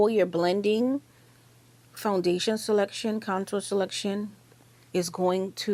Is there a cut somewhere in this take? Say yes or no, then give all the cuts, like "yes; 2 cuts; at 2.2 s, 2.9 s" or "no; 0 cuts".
no; 0 cuts